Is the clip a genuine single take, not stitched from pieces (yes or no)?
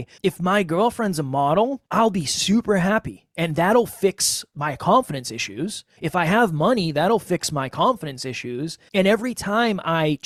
yes